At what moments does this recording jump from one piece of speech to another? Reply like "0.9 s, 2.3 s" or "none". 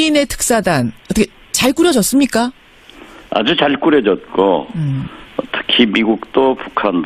4.9 s